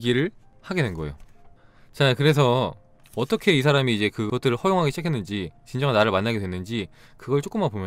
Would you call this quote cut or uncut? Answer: uncut